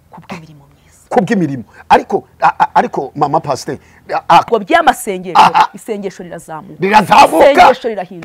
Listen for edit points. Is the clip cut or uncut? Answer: cut